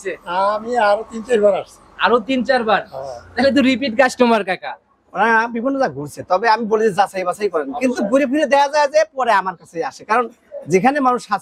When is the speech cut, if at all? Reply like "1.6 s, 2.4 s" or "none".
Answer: none